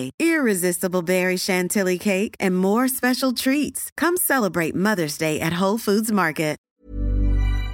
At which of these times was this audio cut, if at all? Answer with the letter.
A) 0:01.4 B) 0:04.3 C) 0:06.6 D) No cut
C